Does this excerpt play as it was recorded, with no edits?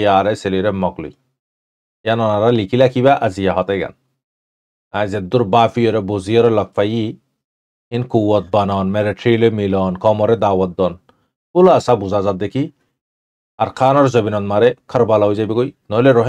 yes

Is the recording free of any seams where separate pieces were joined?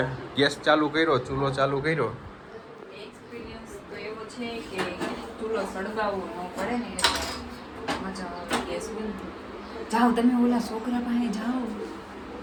yes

